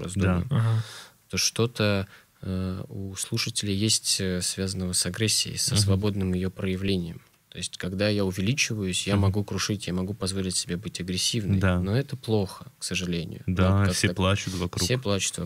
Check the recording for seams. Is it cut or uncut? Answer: uncut